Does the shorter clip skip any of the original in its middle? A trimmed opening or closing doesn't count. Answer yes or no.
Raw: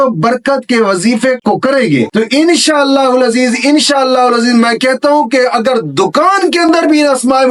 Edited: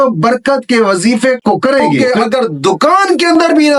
yes